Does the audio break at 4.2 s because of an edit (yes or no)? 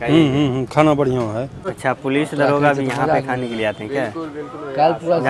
no